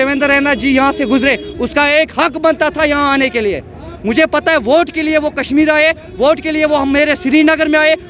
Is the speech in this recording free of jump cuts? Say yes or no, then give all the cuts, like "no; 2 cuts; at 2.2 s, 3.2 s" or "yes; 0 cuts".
yes; 0 cuts